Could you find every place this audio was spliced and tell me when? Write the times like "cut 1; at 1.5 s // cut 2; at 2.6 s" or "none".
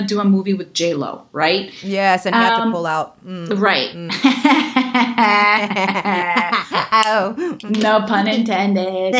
none